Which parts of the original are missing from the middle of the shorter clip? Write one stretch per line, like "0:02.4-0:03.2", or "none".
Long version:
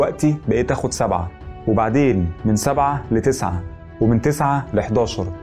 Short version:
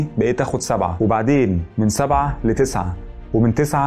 0:01.2-0:01.6